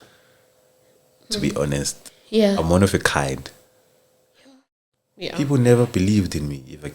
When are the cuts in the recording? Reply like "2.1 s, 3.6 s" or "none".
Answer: 4.9 s